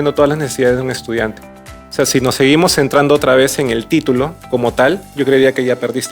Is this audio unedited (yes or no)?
yes